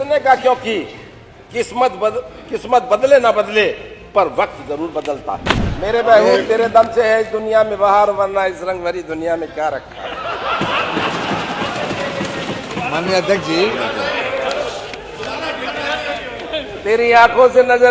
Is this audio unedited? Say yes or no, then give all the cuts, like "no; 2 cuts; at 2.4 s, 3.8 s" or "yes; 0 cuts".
no; 1 cut; at 5.7 s